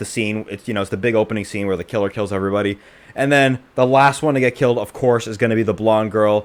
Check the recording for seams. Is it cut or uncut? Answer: uncut